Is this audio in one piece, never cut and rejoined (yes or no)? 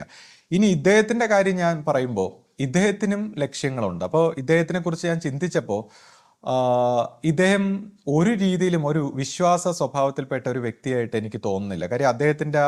yes